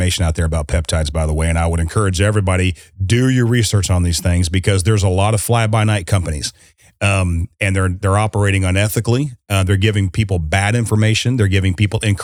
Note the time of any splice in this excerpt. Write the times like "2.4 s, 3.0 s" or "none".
none

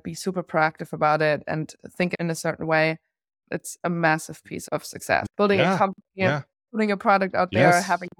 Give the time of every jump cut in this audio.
2.1 s, 3.3 s, 5.3 s

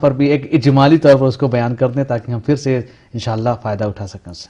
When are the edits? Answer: none

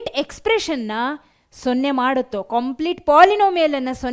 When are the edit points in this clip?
none

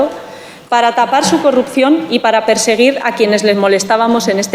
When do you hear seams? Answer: none

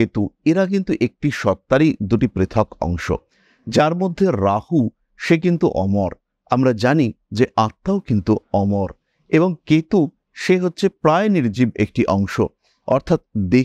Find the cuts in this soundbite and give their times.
none

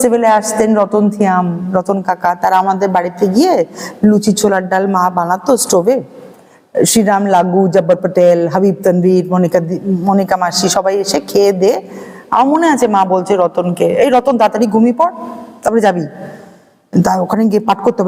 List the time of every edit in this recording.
none

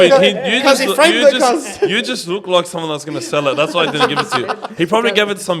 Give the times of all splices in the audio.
none

